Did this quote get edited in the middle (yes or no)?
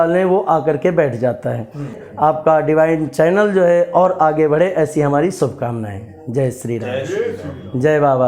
yes